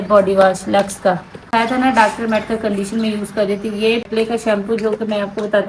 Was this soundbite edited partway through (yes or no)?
yes